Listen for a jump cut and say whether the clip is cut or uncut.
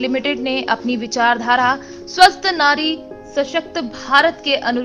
uncut